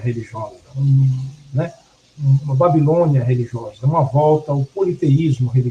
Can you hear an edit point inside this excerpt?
yes; 1 cut; at 3.1 s

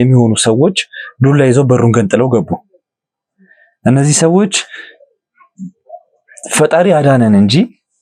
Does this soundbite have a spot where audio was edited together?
no; 0 cuts

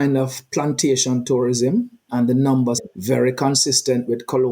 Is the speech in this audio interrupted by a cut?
yes; 2 cuts; at 2.0 s, 2.8 s

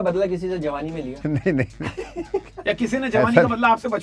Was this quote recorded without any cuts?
no; 1 cut; at 1.1 s

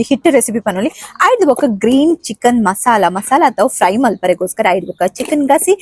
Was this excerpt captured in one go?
yes; 0 cuts

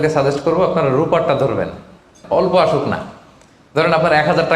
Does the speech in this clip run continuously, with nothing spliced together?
no; 1 cut; at 2.2 s

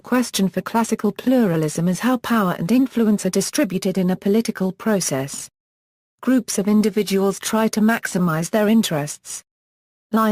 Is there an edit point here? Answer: yes; 1 cut; at 8.1 s

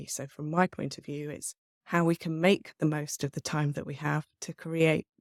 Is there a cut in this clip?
no; 0 cuts

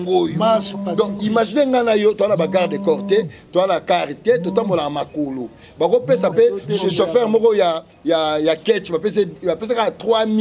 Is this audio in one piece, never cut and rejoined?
yes; 0 cuts

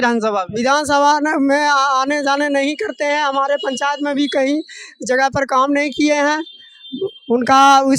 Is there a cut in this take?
no; 0 cuts

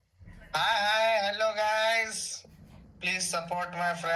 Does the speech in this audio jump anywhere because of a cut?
no; 0 cuts

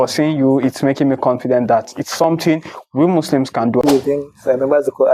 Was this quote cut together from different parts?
yes; 1 cut; at 3.8 s

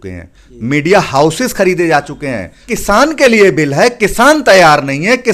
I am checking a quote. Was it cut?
yes; 1 cut; at 2.6 s

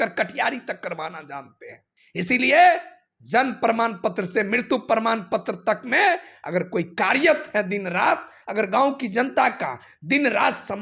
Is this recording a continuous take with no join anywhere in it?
yes; 0 cuts

